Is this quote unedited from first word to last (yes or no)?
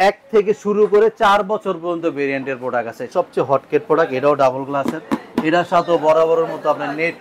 no